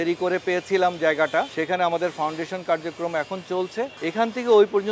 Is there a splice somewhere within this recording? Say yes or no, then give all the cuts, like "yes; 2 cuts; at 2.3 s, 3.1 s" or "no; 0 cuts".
yes; 2 cuts; at 1.5 s, 4.0 s